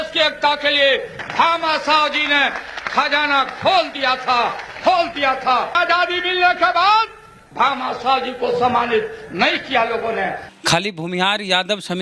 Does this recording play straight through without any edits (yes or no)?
no